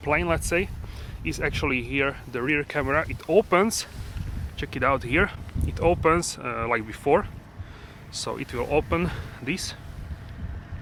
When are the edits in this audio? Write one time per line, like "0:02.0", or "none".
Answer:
none